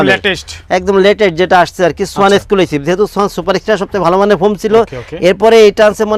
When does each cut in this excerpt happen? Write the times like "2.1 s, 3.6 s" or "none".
none